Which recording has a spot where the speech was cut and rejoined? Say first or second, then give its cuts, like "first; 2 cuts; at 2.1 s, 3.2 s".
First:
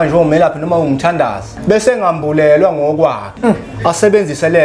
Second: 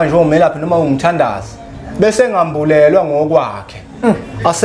first; 2 cuts; at 1.5 s, 3.3 s